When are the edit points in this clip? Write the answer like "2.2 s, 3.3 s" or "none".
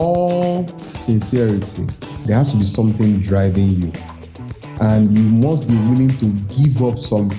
2.1 s